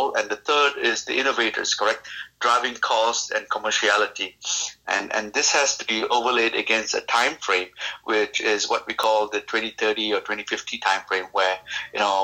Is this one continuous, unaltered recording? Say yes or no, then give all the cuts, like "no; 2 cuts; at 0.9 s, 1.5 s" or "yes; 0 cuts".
yes; 0 cuts